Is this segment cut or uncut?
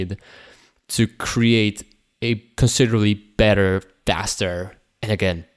cut